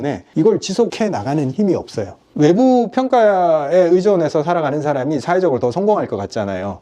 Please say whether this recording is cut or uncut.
cut